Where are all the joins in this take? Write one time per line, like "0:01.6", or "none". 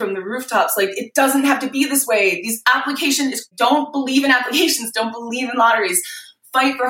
none

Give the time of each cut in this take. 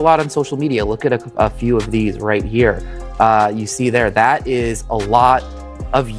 none

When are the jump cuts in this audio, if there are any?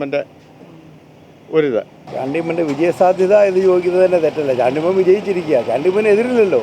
0:02.0

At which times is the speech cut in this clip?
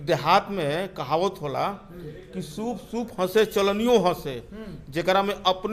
none

